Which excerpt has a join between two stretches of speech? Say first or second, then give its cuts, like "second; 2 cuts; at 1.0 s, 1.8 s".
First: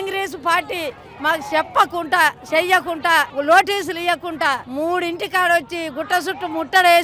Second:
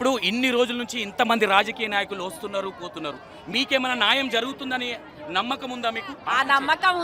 first; 2 cuts; at 3.3 s, 4.7 s